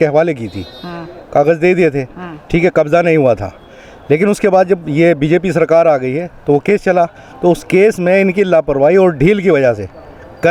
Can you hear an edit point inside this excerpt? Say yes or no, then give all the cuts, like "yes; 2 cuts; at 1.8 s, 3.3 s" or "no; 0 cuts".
no; 0 cuts